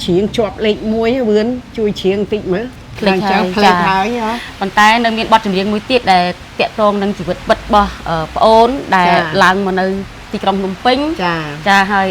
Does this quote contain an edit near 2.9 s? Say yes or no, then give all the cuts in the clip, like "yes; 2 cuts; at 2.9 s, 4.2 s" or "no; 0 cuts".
yes; 1 cut; at 2.9 s